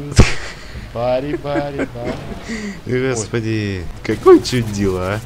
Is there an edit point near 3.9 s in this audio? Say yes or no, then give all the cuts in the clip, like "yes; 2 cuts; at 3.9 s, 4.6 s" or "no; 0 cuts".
yes; 1 cut; at 3.9 s